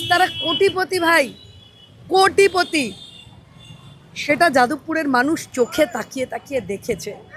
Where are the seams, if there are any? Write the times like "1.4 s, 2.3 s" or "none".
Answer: none

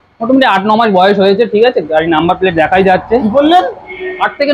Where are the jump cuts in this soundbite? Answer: none

